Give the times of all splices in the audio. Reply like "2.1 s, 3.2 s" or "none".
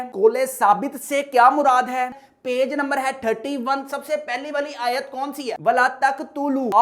2.2 s